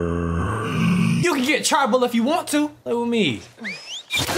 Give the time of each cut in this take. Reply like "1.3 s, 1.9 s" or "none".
1.2 s, 2.8 s